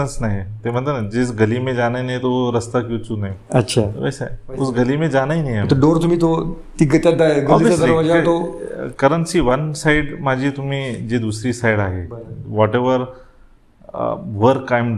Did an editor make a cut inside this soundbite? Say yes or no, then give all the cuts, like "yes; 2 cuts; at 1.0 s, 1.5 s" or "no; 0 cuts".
no; 0 cuts